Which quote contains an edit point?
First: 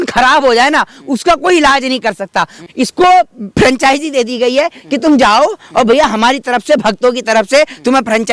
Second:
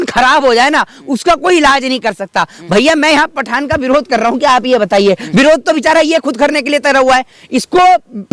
first; 1 cut; at 2.6 s

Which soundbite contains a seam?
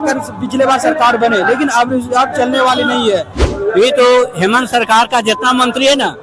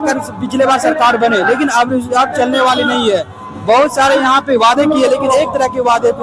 first; 1 cut; at 3.5 s

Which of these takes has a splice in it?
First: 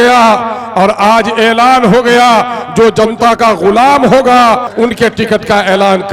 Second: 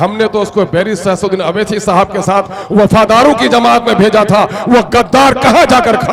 first; 1 cut; at 4.7 s

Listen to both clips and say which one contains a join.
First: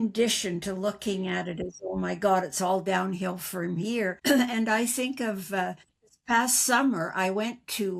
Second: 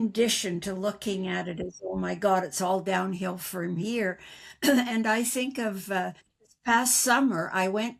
first; 1 cut; at 4.2 s

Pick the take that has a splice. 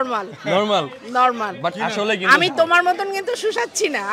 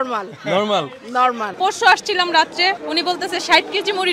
second; 2 cuts; at 1.5 s, 2.8 s

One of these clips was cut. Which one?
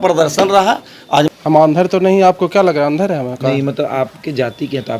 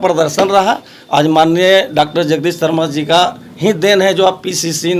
first; 1 cut; at 1.3 s

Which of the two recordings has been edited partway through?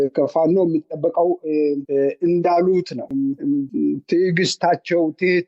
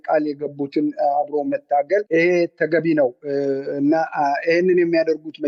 first; 1 cut; at 3.1 s

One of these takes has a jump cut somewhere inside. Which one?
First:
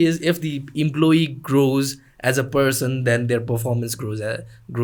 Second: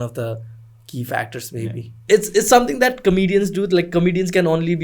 second; 1 cut; at 2.0 s

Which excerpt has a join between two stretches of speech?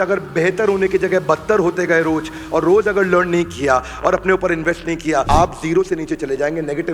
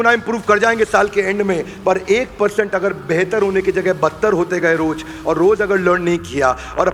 first; 1 cut; at 5.3 s

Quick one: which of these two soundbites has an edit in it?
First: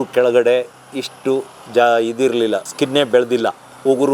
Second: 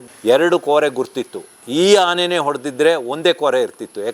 first; 1 cut; at 2.7 s

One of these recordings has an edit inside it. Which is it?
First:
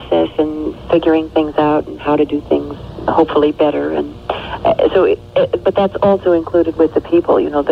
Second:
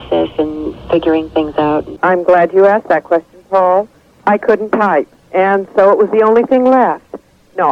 second; 1 cut; at 1.9 s

